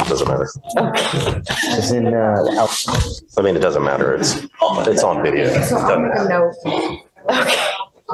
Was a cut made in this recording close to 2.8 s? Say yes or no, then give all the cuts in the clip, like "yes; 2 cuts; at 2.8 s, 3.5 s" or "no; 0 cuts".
no; 0 cuts